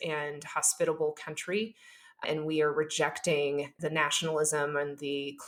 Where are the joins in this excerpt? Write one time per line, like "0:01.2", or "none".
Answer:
none